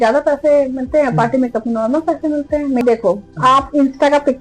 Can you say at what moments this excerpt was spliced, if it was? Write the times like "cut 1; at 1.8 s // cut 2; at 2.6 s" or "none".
cut 1; at 2.8 s